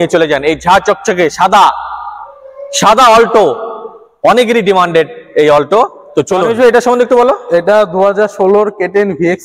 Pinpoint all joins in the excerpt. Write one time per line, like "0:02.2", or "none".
none